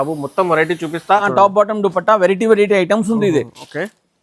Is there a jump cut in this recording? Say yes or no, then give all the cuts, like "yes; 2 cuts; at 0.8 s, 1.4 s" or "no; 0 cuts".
yes; 1 cut; at 1.3 s